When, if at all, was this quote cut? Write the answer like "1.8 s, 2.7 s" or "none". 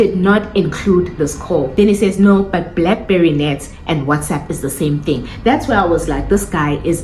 1.7 s